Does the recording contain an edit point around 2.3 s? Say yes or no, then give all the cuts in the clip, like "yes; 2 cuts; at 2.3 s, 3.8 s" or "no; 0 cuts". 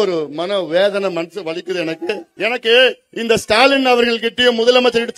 yes; 1 cut; at 2.3 s